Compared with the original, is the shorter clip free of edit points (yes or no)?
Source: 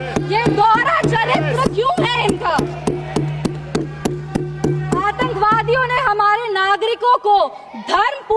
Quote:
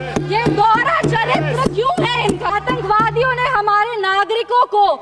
no